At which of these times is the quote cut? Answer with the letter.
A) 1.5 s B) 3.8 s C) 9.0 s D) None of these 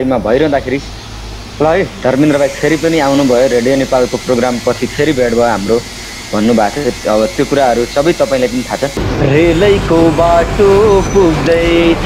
C